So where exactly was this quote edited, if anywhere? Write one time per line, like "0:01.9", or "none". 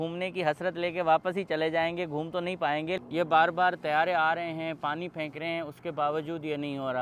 0:03.0